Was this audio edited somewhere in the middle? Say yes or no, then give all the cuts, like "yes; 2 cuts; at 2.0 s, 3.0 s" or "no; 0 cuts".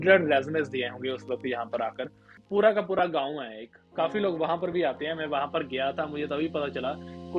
yes; 1 cut; at 2.4 s